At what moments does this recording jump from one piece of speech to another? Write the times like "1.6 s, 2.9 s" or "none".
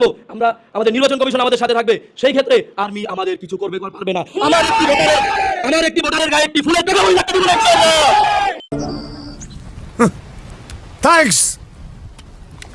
none